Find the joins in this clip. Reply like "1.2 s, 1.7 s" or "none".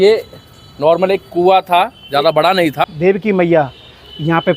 2.9 s